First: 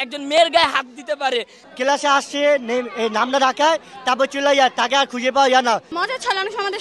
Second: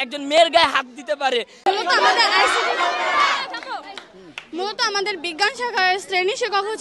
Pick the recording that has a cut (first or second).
first